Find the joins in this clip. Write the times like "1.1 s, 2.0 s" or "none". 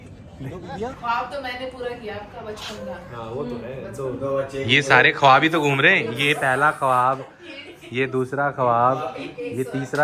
1.0 s